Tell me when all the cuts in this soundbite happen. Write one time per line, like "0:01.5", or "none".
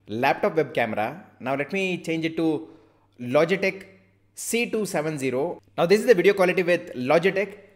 none